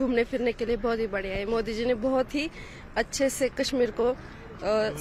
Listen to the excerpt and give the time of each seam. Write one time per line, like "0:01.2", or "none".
none